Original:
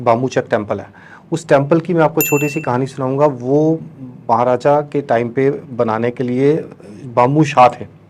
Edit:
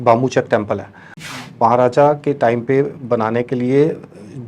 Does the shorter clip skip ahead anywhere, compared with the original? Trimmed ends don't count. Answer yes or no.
yes